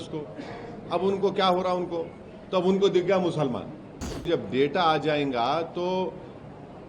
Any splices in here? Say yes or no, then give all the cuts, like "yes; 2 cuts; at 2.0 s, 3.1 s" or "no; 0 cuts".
yes; 1 cut; at 4.3 s